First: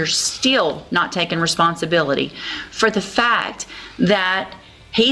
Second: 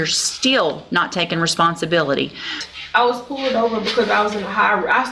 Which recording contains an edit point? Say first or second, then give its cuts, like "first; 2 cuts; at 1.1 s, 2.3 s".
second; 1 cut; at 2.6 s